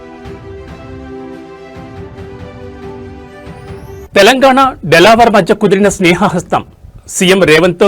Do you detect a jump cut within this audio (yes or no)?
yes